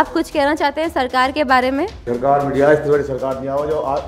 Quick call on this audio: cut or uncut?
cut